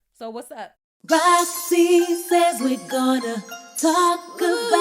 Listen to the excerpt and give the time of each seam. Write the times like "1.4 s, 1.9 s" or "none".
1.0 s